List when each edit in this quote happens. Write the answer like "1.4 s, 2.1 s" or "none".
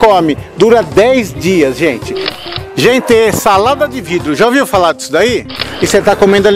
2.3 s, 5.6 s